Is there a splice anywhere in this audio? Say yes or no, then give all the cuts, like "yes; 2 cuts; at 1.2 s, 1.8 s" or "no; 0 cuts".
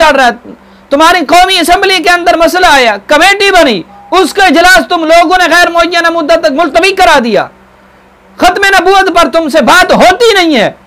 no; 0 cuts